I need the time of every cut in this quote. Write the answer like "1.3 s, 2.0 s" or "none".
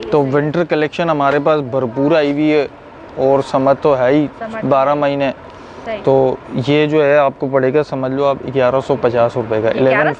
none

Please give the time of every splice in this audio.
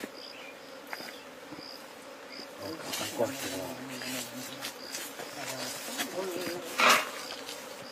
4.9 s

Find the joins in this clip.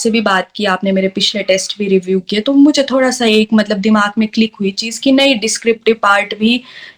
none

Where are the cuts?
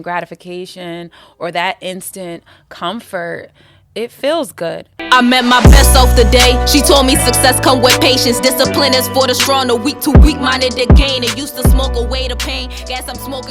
5.0 s

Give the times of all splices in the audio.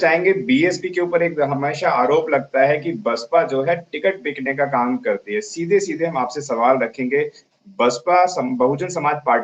none

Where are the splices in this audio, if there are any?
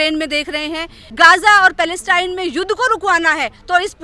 1.0 s

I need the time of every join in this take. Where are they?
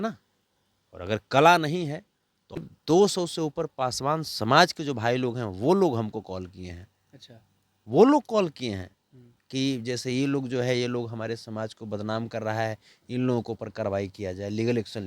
2.6 s

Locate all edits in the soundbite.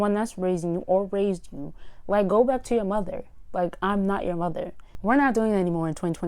4.8 s

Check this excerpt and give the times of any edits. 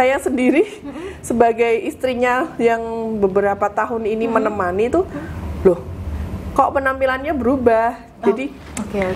none

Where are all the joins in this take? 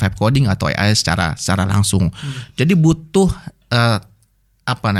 none

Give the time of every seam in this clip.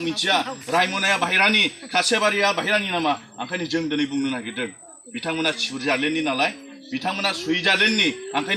none

